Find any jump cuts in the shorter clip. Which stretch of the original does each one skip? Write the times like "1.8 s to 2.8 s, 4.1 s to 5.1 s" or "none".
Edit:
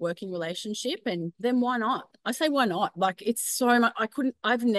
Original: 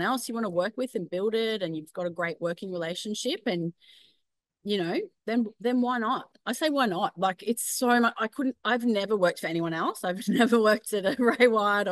3.7 s to 5.5 s